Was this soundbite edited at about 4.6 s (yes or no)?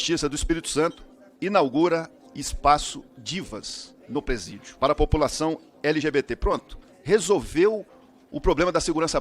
yes